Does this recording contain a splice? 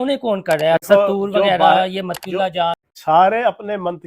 yes; 1 cut; at 2.9 s

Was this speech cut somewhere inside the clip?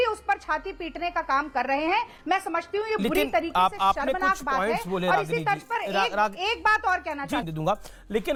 no; 0 cuts

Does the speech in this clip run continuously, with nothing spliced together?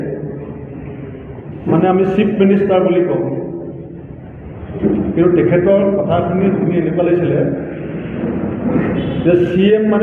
yes; 0 cuts

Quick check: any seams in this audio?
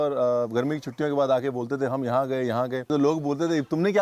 yes; 1 cut; at 2.9 s

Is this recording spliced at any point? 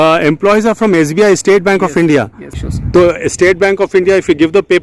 yes; 1 cut; at 2.5 s

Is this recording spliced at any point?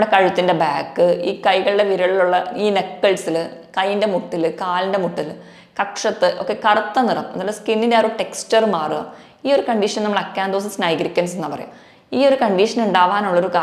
no; 0 cuts

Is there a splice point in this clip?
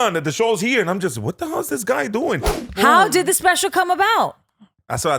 yes; 1 cut; at 2.6 s

